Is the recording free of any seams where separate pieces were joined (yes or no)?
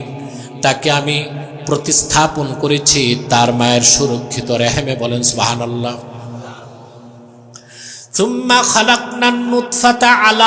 yes